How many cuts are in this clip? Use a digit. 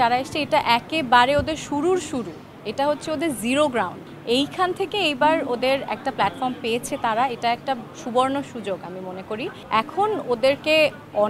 0